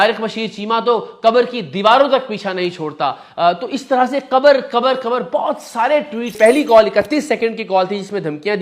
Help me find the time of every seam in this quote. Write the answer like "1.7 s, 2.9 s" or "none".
6.3 s